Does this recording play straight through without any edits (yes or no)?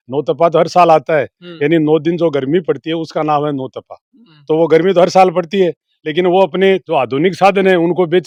yes